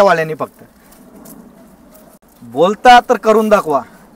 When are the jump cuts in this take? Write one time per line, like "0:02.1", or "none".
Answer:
none